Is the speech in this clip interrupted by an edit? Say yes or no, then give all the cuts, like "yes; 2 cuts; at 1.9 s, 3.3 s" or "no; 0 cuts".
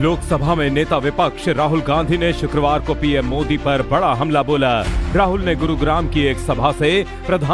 yes; 1 cut; at 3.5 s